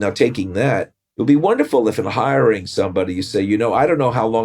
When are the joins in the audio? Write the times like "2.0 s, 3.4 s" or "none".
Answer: 1.0 s